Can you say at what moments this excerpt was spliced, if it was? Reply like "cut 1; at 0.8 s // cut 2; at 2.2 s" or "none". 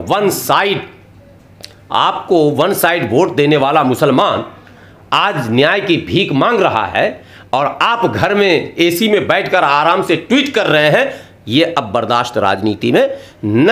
none